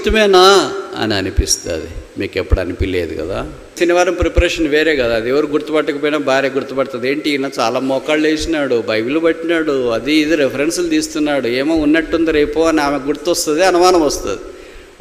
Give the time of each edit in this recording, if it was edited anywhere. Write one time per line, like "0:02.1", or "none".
0:03.7